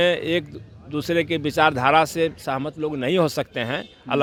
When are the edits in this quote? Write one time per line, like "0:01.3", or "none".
none